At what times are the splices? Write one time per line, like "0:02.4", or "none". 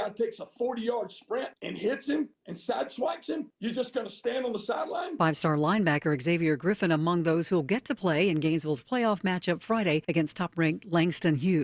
0:02.1
0:03.5